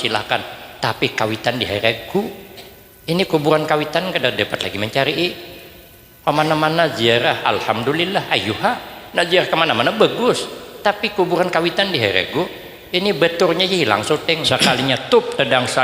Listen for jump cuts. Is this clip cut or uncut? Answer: cut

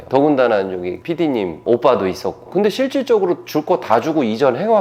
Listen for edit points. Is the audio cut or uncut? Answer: cut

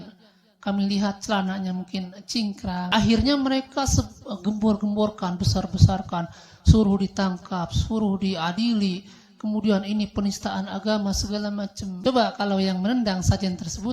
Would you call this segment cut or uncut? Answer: cut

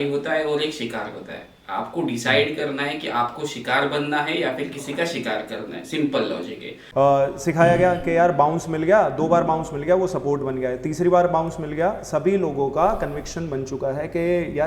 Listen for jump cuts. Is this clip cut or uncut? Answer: cut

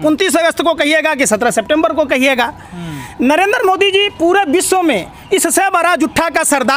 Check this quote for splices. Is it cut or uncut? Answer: uncut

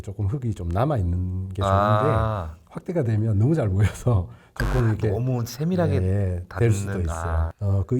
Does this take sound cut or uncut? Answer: uncut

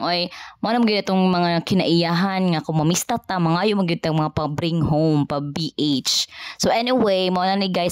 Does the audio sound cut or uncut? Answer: uncut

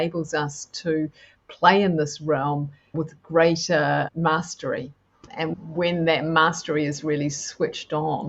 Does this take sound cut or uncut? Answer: cut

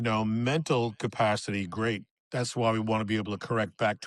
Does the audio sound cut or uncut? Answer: uncut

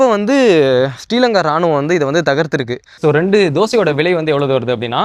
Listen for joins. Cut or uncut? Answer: cut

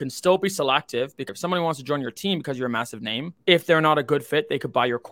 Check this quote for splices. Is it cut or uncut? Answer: cut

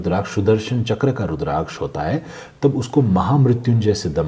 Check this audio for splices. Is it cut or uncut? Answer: uncut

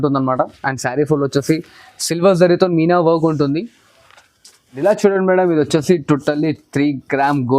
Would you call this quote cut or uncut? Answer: cut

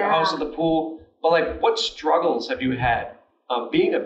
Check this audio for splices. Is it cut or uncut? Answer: uncut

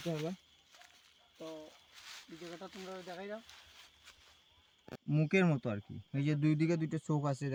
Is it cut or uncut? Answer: uncut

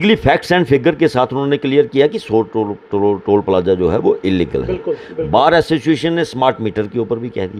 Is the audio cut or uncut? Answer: uncut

